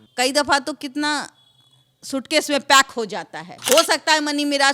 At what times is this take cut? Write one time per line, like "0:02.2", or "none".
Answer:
0:03.5

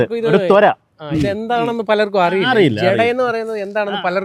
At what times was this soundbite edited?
none

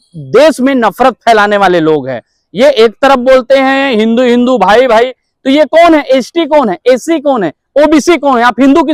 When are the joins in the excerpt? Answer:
none

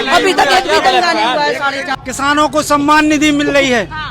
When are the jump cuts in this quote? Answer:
0:01.9

